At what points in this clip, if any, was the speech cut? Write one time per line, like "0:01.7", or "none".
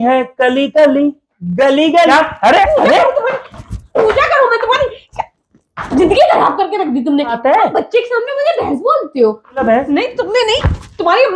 0:02.1
0:07.4
0:09.6